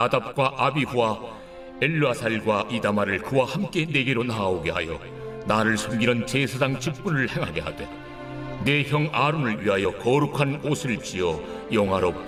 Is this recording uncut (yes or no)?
yes